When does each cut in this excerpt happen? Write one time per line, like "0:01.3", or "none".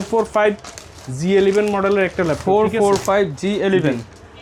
none